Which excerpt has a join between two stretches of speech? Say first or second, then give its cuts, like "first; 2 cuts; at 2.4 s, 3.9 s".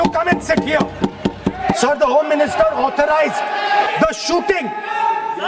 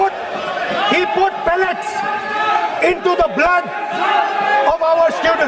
first; 2 cuts; at 1.7 s, 3.9 s